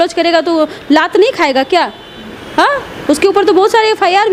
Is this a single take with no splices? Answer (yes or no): yes